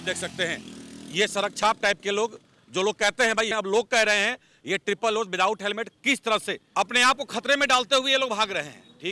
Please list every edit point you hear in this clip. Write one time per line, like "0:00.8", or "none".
0:03.5
0:06.6